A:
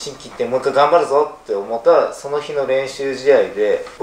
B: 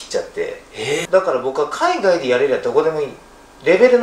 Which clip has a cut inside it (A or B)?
B